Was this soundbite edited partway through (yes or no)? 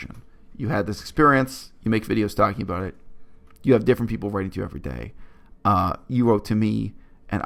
no